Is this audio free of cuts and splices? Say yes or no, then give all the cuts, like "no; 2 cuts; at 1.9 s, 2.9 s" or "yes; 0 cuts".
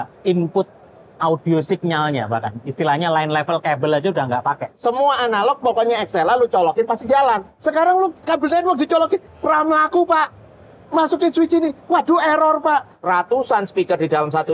no; 3 cuts; at 4.7 s, 7.5 s, 12.9 s